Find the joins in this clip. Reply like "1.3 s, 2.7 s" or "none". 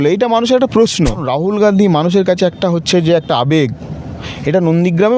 1.3 s